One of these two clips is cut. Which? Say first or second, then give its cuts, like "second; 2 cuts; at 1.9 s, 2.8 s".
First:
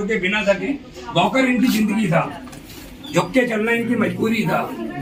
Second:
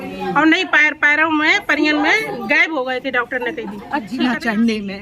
second; 1 cut; at 4.1 s